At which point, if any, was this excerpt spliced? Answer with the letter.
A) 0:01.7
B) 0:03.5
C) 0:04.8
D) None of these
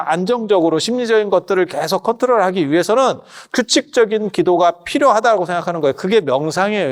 D